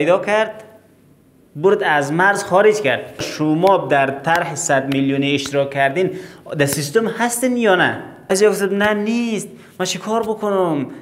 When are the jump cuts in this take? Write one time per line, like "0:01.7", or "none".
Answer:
0:03.3
0:08.3